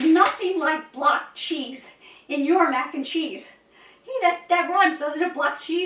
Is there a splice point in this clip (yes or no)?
no